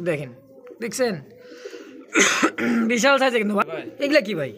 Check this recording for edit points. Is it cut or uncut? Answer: cut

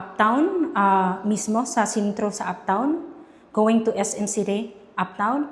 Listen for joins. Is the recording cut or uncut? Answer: uncut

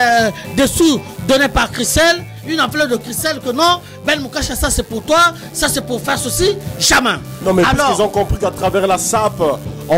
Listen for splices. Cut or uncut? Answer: uncut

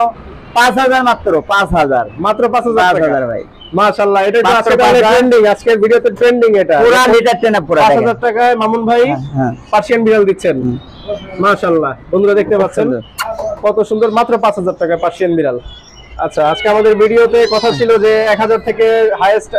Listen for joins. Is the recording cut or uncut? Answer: uncut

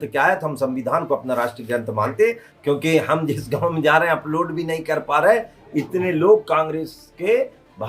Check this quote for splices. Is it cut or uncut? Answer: cut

